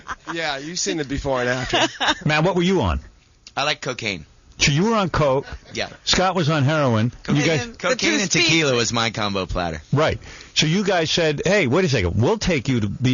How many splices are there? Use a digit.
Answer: 1